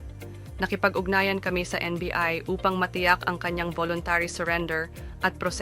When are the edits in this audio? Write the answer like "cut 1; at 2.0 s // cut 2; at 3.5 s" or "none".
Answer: cut 1; at 4.7 s